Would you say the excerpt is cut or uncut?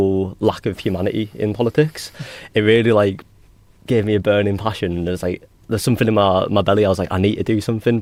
uncut